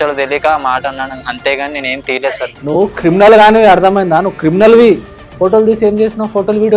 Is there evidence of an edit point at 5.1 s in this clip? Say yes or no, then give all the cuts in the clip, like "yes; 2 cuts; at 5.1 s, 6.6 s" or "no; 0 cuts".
yes; 1 cut; at 5.1 s